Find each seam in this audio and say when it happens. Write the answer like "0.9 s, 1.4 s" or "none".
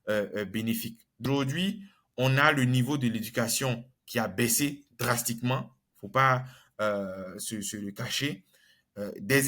1.2 s